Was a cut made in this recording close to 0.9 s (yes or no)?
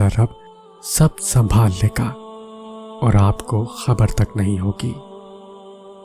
no